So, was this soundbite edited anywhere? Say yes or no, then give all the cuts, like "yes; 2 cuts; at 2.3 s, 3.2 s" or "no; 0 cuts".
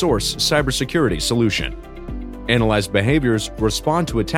no; 0 cuts